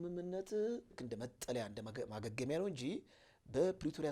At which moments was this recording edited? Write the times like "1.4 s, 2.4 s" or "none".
1.0 s